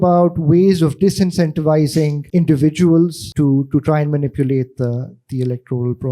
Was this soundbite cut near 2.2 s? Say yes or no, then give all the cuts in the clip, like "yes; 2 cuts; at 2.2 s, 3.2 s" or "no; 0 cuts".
yes; 2 cuts; at 2.2 s, 3.2 s